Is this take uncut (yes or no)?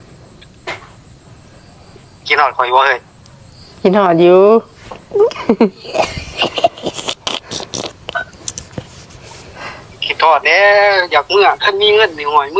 yes